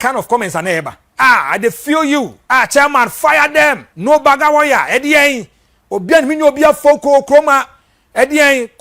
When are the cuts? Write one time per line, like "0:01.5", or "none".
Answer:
0:01.0
0:02.4
0:03.9